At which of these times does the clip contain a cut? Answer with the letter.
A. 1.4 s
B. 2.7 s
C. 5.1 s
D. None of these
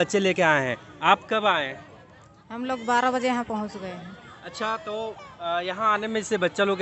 D